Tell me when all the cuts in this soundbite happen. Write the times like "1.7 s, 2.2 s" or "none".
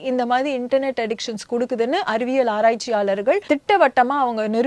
3.4 s